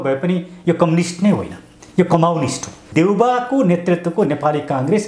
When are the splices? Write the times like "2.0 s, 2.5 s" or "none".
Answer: 2.8 s